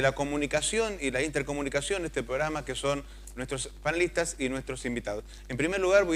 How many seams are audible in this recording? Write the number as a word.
one